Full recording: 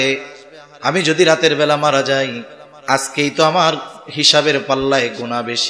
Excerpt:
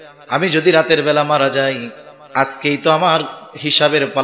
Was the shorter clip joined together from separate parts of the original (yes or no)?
no